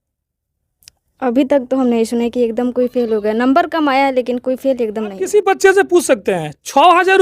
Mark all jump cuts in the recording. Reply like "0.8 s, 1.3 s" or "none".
5.2 s